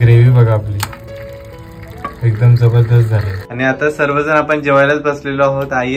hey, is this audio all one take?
no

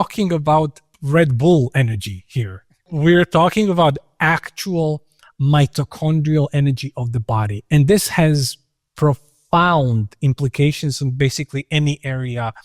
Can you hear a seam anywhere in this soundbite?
no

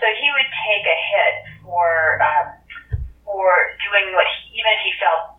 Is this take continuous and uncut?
yes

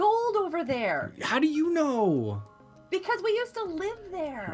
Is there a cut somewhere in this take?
no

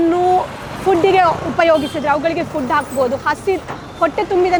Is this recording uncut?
yes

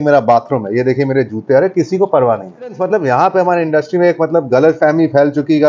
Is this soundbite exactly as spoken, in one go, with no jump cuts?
no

